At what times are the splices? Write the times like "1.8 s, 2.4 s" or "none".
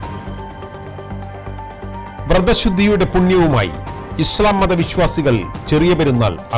1.0 s